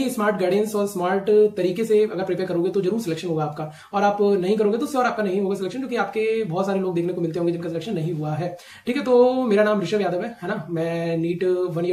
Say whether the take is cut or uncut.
uncut